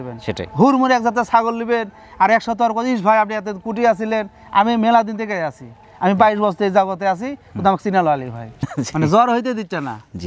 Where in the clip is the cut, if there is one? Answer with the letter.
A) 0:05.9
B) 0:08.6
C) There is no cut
B